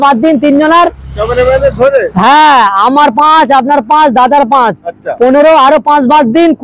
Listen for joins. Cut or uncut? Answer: uncut